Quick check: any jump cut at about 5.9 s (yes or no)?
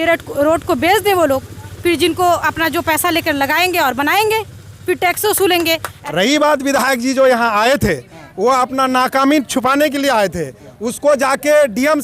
yes